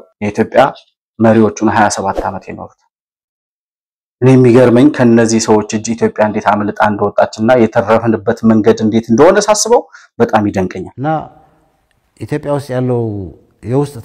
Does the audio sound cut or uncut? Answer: cut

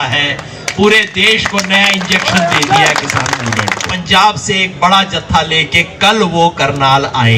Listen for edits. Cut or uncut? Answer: cut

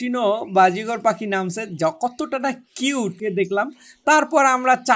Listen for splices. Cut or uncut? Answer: cut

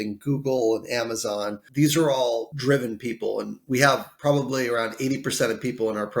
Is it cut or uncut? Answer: cut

